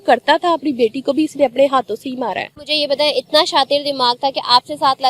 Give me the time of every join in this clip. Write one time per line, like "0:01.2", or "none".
0:02.7